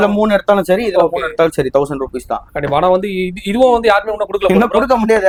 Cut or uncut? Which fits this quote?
uncut